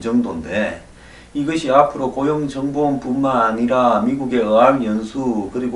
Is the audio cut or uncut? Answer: uncut